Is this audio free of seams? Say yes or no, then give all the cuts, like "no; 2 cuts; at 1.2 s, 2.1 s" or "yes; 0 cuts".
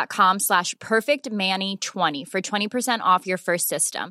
no; 1 cut; at 2.1 s